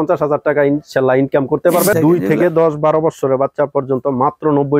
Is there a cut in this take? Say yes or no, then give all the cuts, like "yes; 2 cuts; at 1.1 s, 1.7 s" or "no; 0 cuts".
yes; 1 cut; at 1.9 s